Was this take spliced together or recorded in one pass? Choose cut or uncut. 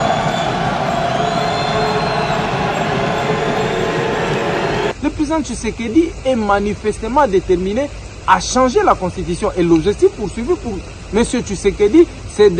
cut